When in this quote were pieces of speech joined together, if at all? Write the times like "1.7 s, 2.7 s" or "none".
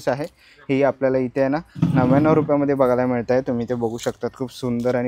none

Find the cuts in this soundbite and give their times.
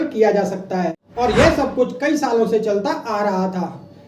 1.0 s

